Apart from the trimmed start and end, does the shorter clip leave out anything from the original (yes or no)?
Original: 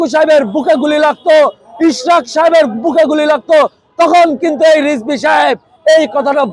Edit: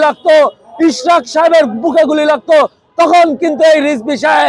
no